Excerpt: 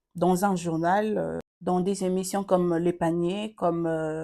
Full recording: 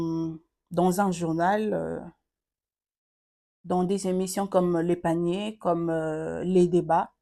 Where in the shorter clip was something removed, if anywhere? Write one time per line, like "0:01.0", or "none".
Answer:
0:01.5